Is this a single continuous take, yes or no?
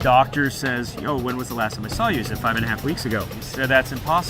no